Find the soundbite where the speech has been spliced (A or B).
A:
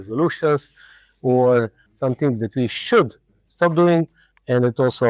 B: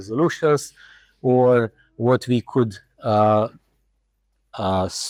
A